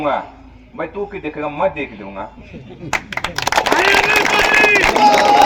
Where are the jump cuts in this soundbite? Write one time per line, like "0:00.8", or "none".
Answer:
none